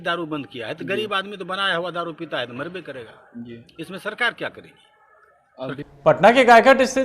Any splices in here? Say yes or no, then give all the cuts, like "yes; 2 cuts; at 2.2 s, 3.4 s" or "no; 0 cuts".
yes; 1 cut; at 6.0 s